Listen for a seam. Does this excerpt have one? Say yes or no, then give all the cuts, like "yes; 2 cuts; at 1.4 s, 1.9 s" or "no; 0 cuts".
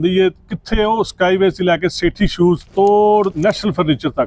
yes; 2 cuts; at 2.7 s, 3.4 s